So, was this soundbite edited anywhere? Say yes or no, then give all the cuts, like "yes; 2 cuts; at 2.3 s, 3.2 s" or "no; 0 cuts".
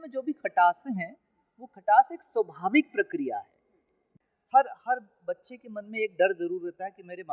yes; 1 cut; at 4.1 s